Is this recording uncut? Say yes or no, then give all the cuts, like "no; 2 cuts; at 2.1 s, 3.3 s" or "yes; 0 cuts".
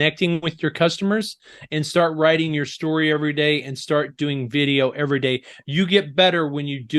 yes; 0 cuts